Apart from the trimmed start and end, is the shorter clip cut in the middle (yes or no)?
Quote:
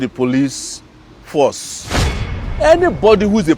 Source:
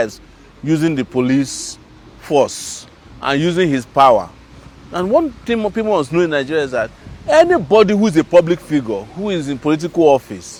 yes